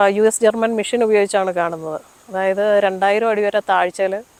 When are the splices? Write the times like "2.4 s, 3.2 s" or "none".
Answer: none